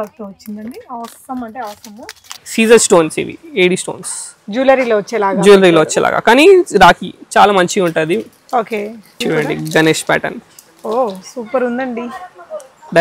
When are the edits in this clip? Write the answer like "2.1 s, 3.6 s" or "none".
2.4 s, 9.2 s